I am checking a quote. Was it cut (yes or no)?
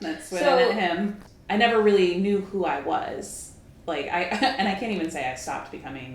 yes